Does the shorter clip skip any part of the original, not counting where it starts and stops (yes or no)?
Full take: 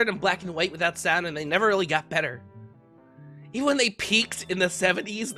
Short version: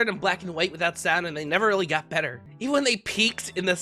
yes